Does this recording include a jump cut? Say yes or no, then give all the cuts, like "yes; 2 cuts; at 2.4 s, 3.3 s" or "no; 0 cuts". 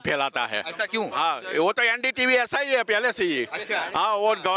no; 0 cuts